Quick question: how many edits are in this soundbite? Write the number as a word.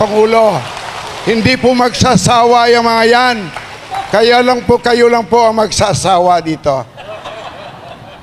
zero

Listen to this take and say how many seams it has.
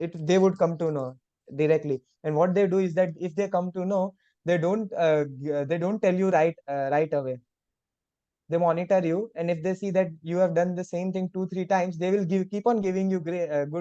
zero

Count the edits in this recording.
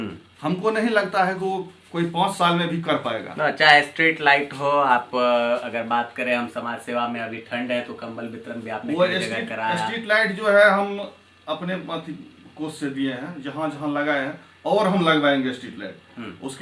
zero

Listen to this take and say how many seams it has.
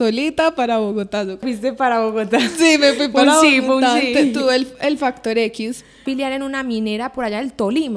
two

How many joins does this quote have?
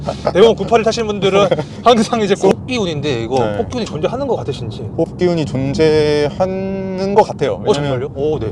one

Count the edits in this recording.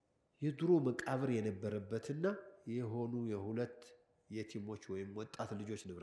zero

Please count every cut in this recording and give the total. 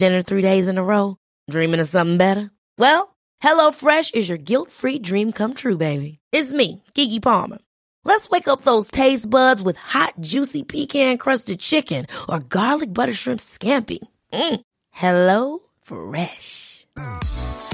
zero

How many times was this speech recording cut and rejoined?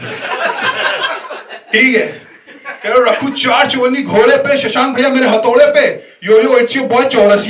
zero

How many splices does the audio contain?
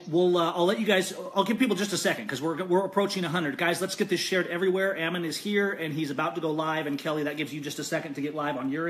one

